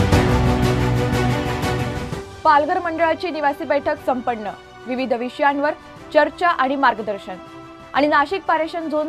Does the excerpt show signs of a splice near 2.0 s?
yes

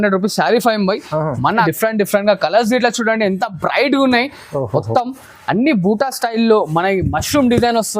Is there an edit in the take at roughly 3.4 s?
no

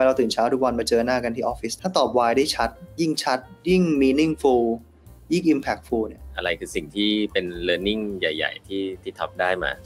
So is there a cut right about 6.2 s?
yes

